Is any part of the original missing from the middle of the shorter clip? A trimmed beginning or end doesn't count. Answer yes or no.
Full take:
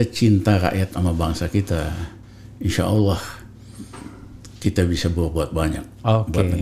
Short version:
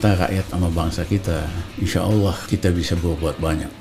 yes